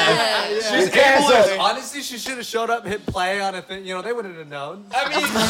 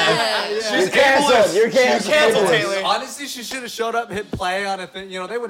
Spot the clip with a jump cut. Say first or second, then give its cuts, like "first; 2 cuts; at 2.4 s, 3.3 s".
first; 1 cut; at 1.5 s